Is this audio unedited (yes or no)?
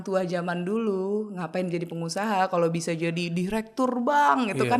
yes